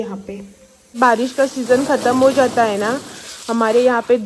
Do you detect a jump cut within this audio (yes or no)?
yes